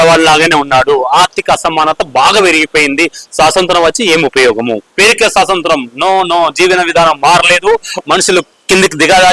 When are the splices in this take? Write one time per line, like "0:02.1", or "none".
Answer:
0:04.9

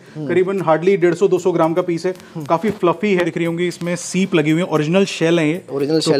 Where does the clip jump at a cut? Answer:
0:03.3

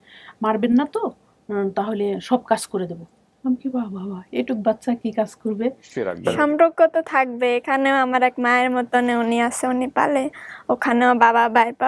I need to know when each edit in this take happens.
0:06.2

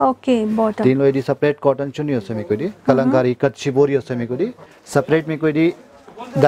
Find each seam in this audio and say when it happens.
0:04.6

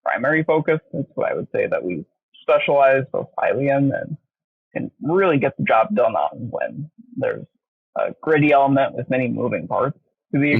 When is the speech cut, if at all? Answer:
none

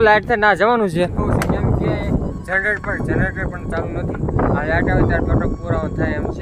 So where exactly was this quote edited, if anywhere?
0:01.2

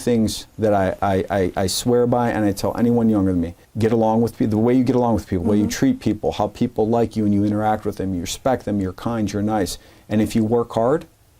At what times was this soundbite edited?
0:03.6

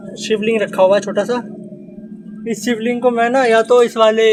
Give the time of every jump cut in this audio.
none

